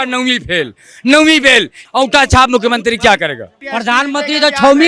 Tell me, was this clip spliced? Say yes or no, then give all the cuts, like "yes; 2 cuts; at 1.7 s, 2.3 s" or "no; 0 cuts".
yes; 2 cuts; at 1.8 s, 3.5 s